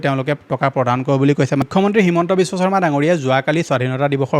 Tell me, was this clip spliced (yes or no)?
yes